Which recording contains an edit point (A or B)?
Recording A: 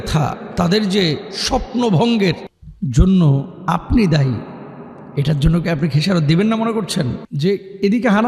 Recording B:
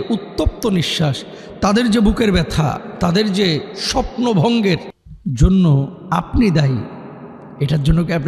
A